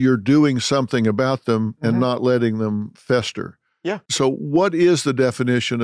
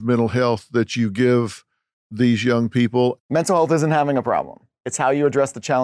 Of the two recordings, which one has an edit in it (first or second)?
second